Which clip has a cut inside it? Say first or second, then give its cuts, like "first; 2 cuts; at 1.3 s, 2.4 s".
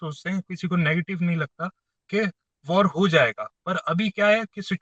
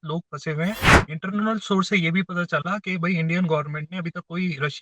second; 1 cut; at 0.9 s